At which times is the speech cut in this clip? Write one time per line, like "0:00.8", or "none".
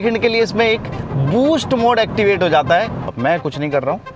0:03.1